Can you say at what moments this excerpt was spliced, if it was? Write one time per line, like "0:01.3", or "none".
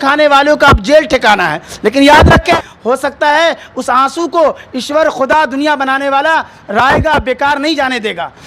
0:02.6